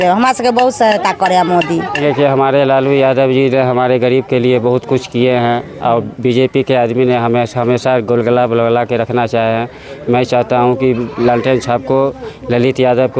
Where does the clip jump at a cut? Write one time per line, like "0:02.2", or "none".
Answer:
0:02.0